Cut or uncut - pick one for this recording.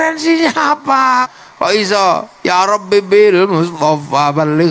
cut